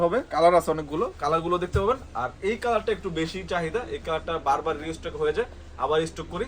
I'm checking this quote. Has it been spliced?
no; 0 cuts

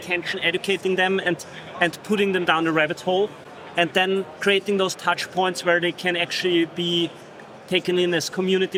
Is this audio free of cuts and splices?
yes; 0 cuts

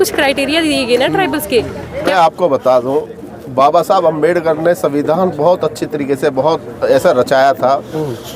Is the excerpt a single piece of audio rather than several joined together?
no; 1 cut; at 2.1 s

